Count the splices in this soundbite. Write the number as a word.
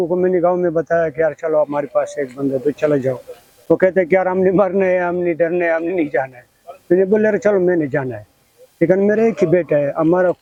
zero